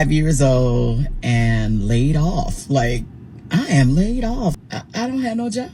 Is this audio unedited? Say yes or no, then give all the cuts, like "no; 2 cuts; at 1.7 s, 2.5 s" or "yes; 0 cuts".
no; 1 cut; at 4.6 s